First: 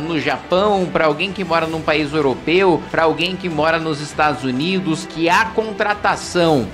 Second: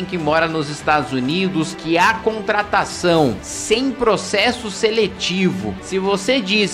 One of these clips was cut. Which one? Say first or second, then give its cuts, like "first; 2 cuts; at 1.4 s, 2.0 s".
second; 1 cut; at 5.8 s